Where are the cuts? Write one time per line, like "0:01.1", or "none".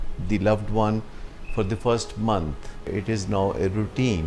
0:02.9